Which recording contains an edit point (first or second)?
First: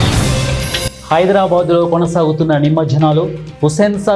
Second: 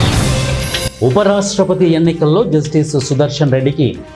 first